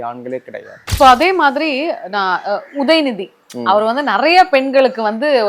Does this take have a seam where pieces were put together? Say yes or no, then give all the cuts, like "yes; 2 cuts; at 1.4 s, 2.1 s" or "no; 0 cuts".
yes; 1 cut; at 0.9 s